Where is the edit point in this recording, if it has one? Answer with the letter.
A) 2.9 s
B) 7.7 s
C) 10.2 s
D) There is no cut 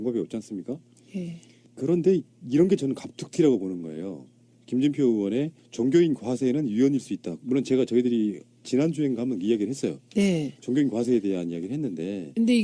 C